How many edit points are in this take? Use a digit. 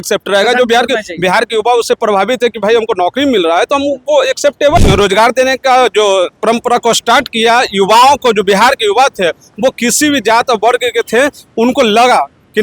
1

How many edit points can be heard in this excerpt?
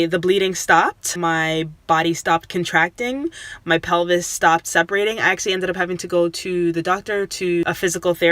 2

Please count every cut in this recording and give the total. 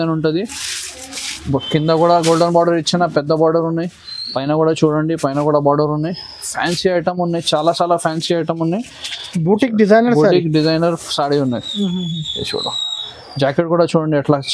0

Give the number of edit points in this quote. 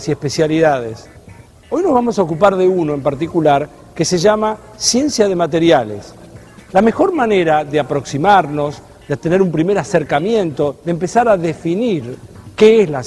1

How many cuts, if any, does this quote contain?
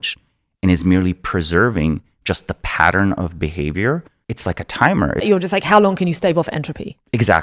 2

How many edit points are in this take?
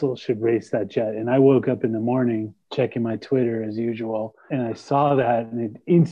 0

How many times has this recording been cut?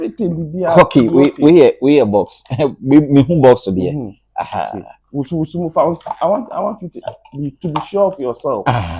0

